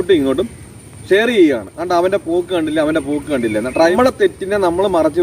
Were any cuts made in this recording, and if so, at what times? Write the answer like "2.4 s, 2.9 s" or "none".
3.9 s